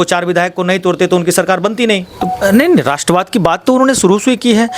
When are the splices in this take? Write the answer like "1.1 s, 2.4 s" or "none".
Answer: 2.2 s